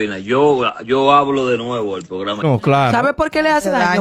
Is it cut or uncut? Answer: cut